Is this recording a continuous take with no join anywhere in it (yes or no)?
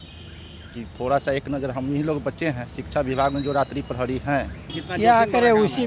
no